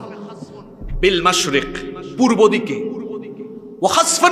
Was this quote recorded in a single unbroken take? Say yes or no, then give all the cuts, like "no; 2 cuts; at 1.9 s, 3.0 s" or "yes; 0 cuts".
yes; 0 cuts